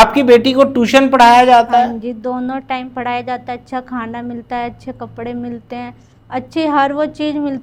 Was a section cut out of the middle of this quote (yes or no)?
no